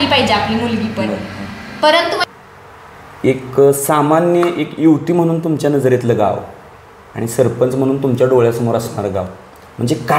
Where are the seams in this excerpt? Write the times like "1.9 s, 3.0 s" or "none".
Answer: 2.3 s